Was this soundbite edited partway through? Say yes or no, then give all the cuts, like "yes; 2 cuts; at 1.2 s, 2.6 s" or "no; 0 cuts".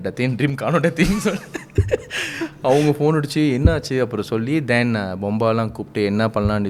no; 0 cuts